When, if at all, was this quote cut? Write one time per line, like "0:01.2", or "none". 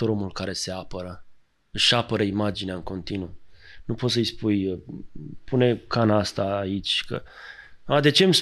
none

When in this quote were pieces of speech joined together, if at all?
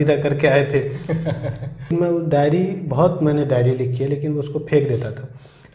0:01.9

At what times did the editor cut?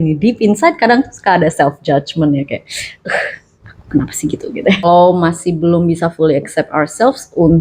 0:04.8

